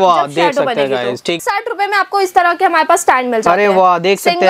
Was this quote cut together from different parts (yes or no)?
yes